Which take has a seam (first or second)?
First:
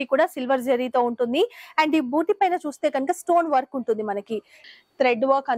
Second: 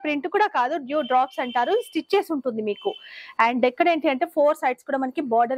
first